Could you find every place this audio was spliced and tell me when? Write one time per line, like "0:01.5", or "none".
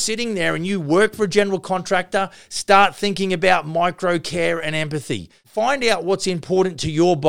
0:05.4